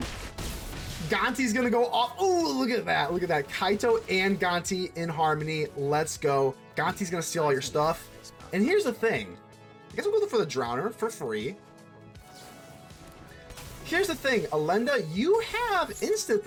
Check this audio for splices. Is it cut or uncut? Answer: uncut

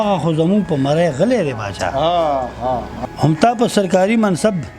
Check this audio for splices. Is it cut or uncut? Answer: cut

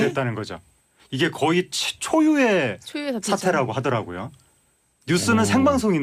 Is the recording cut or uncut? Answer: uncut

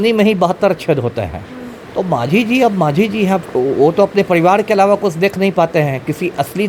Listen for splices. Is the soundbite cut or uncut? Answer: uncut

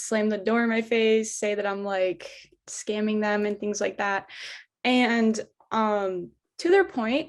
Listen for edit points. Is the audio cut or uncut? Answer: uncut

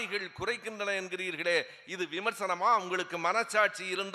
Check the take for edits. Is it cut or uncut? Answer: uncut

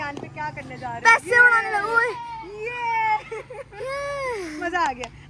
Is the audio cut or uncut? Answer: uncut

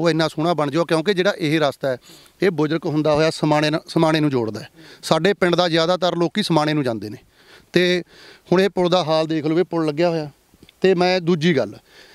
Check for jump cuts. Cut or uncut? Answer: uncut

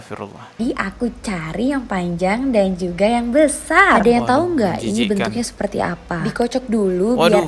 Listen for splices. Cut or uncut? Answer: uncut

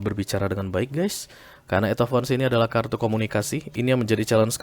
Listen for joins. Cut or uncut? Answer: uncut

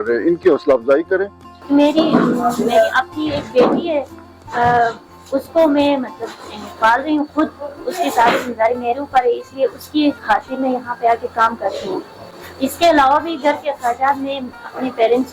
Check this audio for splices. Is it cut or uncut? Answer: cut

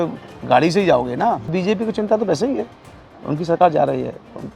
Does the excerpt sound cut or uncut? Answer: cut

